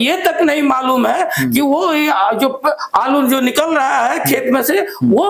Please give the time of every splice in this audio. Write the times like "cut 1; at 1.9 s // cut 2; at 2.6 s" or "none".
none